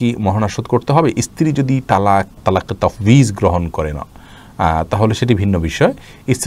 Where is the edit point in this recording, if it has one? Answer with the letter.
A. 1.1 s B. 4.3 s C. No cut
C